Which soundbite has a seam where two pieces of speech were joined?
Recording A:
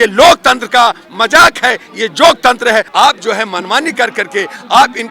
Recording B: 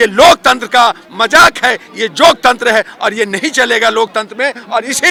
A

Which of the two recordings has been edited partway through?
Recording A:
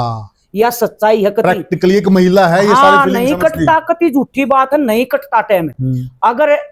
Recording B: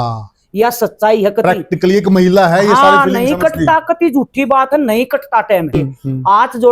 B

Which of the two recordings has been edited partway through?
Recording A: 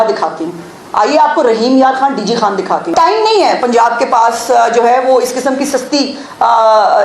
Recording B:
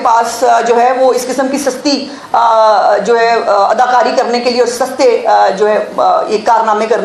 A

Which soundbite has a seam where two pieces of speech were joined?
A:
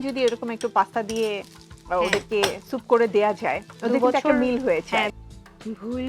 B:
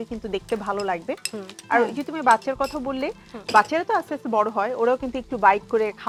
A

